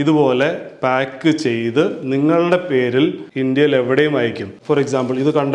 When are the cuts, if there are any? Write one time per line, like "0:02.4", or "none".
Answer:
0:03.2
0:04.5